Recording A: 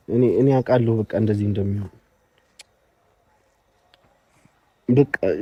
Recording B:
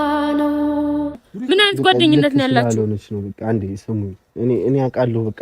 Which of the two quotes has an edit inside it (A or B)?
B